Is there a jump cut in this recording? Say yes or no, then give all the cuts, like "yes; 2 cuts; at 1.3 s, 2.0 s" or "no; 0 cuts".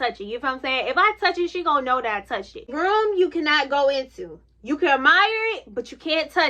yes; 1 cut; at 2.6 s